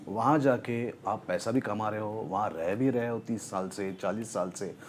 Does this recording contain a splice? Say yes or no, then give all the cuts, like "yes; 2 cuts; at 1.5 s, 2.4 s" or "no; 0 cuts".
no; 0 cuts